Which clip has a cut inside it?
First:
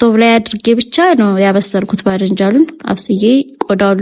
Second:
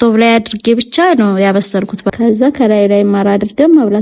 second; 1 cut; at 2.1 s

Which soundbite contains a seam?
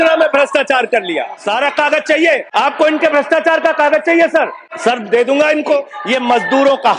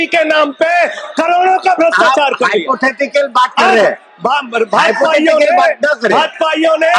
first; 4 cuts; at 1.4 s, 2.5 s, 4.6 s, 6.0 s

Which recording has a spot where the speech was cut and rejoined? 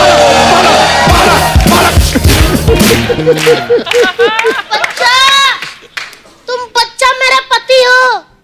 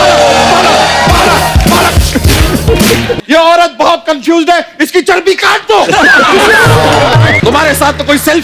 second; 2 cuts; at 3.2 s, 7.4 s

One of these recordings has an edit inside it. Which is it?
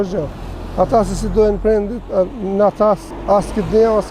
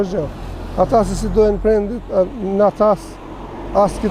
first; 1 cut; at 3.1 s

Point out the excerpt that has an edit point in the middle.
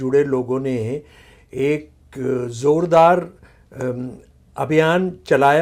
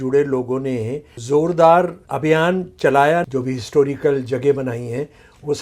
second; 3 cuts; at 1.2 s, 2.0 s, 3.2 s

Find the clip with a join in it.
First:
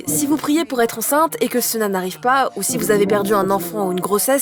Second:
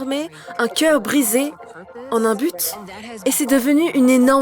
second; 2 cuts; at 1.9 s, 3.1 s

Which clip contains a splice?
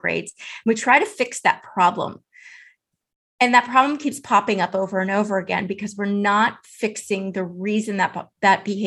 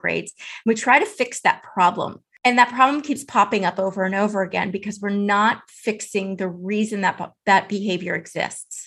second; 1 cut; at 2.2 s

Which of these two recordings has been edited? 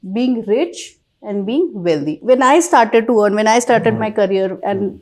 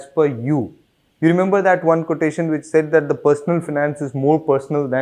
first; 1 cut; at 2.2 s

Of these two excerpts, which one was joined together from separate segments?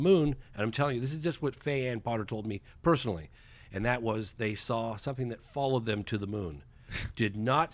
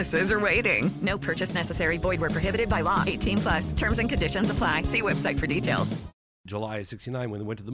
second; 1 cut; at 6.4 s

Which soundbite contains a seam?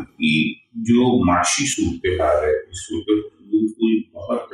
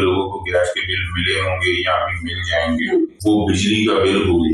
second; 1 cut; at 3.2 s

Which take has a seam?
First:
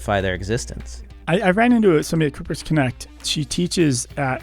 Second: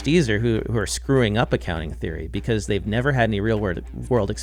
first; 1 cut; at 1.0 s

